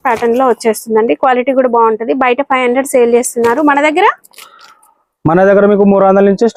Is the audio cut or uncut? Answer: uncut